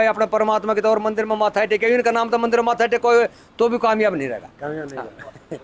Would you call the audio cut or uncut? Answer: uncut